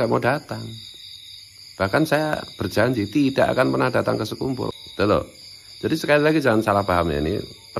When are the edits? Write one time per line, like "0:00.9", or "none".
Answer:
0:04.7